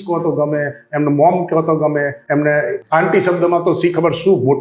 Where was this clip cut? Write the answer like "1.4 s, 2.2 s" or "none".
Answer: 2.2 s, 2.8 s